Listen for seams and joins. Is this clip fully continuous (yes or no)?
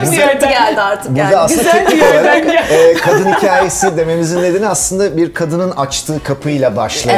yes